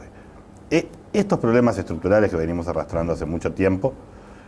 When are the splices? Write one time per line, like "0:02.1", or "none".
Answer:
0:01.2

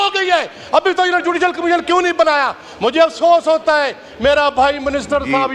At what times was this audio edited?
none

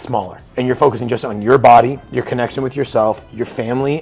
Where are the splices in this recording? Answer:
none

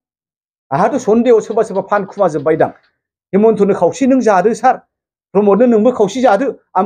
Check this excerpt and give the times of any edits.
none

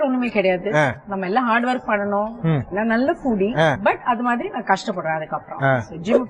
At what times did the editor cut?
0:01.1
0:02.7
0:03.8

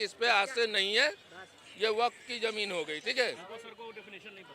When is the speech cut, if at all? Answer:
none

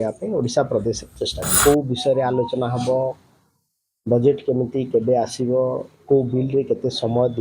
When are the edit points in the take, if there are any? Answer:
0:01.5

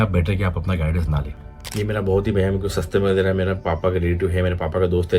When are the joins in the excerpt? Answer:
0:01.7

